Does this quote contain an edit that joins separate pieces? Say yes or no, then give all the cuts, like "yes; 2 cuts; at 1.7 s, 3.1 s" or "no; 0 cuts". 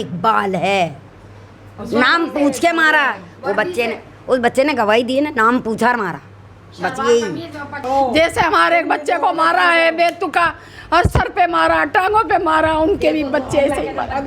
yes; 1 cut; at 7.9 s